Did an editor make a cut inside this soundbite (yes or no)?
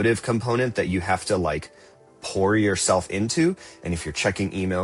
no